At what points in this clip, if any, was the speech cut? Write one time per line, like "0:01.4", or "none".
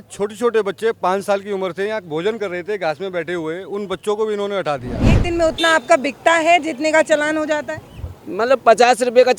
0:05.2